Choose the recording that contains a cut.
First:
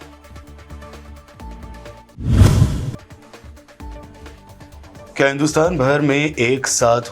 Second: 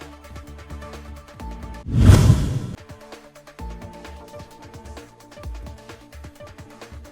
second; 1 cut; at 1.8 s

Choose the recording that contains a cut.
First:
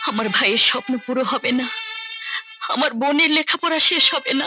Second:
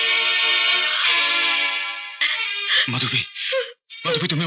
second; 1 cut; at 2.3 s

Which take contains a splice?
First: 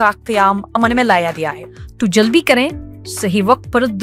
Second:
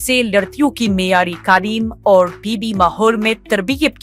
first; 1 cut; at 1.6 s

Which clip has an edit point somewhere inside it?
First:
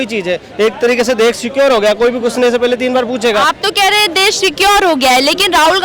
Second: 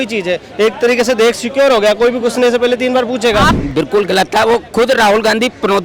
second; 1 cut; at 3.6 s

